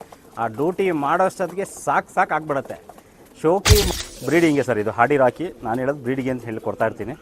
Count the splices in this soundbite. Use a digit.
1